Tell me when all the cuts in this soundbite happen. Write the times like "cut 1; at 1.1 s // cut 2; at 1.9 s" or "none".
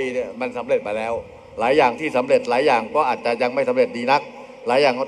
none